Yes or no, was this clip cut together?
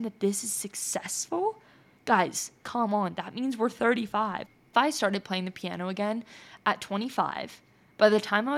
yes